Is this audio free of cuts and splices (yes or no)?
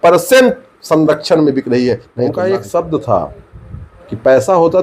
no